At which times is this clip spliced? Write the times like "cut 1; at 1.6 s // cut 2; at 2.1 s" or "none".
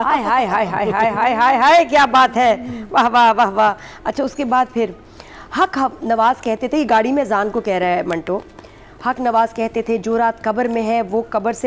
none